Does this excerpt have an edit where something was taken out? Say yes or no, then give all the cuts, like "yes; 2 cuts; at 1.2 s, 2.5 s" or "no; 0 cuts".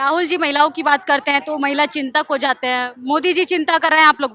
no; 0 cuts